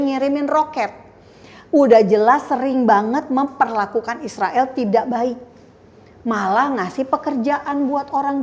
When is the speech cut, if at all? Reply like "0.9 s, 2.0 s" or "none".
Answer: none